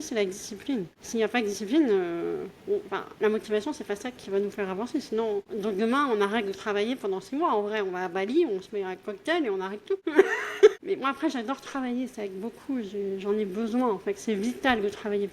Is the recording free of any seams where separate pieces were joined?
no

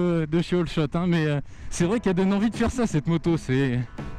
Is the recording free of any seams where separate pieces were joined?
yes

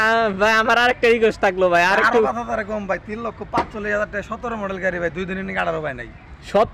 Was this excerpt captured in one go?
yes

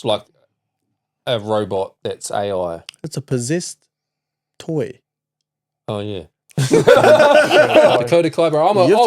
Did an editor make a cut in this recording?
yes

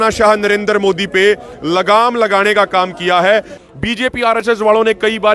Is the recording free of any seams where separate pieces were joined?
no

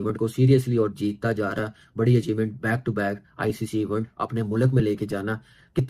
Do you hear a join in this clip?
no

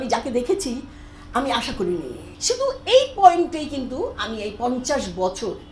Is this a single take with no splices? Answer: no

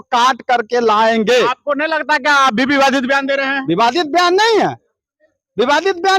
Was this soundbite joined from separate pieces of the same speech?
no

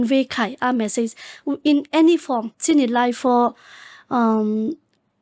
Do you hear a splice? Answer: yes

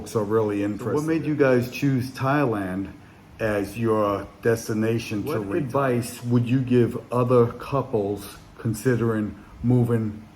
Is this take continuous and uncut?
no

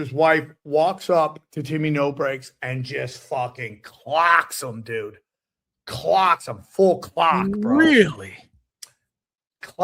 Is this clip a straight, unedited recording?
yes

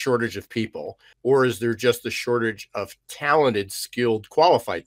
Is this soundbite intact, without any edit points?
no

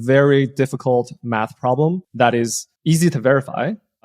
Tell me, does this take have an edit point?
yes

